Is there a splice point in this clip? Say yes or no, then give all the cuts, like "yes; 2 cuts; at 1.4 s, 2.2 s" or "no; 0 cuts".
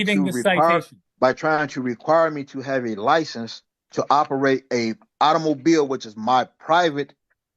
yes; 1 cut; at 1.0 s